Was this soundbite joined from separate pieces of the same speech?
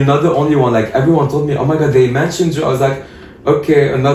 no; 0 cuts

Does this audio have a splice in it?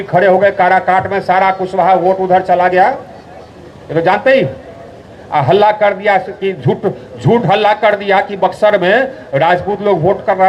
no; 0 cuts

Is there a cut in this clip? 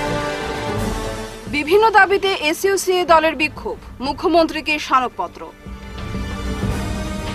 yes; 1 cut; at 1.1 s

